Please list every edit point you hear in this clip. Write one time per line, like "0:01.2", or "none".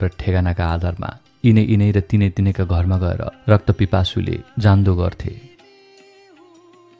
0:05.4